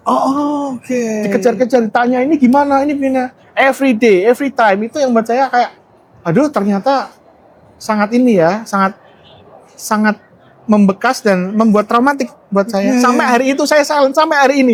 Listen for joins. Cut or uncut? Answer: uncut